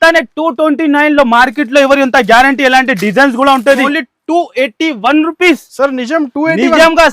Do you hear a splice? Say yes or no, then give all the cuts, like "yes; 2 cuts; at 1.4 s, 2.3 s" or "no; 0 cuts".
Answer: yes; 1 cut; at 3.8 s